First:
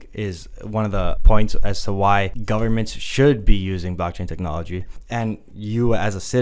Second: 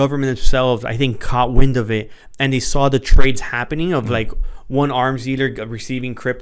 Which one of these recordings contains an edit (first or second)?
first